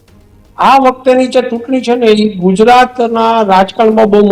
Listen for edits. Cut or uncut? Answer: uncut